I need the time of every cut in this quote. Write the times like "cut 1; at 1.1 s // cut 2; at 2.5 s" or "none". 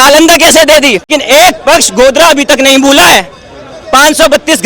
cut 1; at 1.2 s